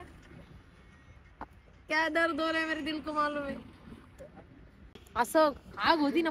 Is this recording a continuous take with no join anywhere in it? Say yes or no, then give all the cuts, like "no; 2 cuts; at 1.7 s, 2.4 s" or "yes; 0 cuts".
no; 1 cut; at 4.9 s